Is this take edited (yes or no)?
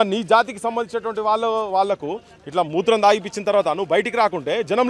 no